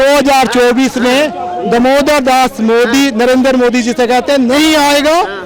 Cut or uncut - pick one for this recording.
uncut